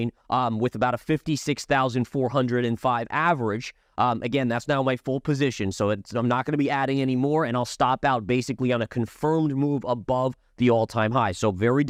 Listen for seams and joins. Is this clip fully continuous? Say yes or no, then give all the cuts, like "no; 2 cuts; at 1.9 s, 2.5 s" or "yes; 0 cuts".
yes; 0 cuts